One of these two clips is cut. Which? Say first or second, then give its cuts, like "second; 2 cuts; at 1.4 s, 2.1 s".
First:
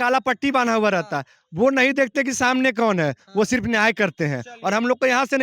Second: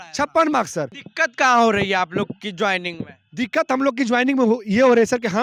second; 1 cut; at 1.0 s